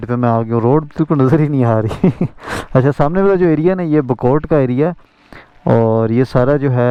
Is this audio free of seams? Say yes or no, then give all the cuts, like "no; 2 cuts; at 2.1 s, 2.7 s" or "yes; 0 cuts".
yes; 0 cuts